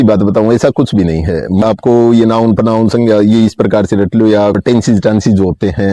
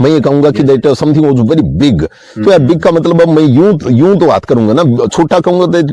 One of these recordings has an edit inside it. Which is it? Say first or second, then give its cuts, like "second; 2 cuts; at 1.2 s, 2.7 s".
first; 2 cuts; at 1.6 s, 4.6 s